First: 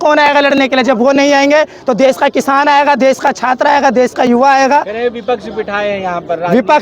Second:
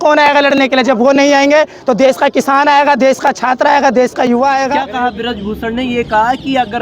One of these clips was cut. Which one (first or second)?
second